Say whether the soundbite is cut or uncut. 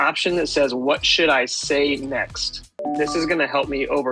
cut